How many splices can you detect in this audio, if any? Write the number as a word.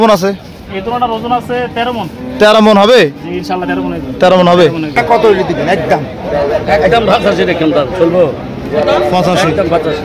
one